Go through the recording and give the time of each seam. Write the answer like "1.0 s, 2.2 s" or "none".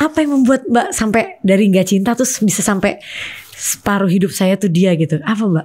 none

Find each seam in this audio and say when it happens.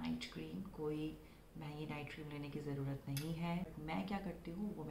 3.7 s

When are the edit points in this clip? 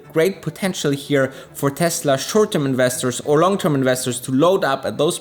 none

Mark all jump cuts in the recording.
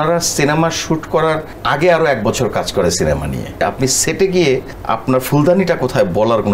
1.5 s, 3.6 s, 4.7 s

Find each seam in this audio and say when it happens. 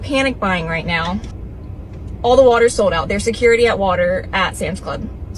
1.3 s

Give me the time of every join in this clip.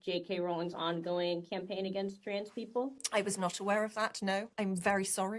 4.5 s

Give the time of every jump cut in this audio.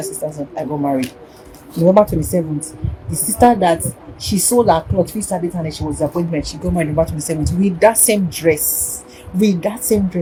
none

